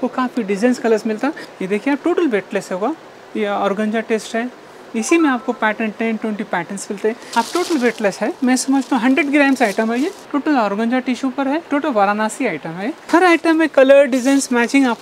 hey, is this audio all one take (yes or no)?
no